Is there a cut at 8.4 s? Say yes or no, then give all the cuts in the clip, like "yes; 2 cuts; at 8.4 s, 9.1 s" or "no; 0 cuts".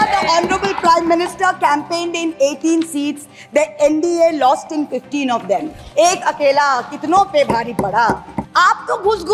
yes; 1 cut; at 8.4 s